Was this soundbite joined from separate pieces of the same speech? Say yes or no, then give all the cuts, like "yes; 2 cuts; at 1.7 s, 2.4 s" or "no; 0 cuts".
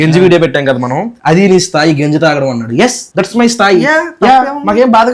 no; 0 cuts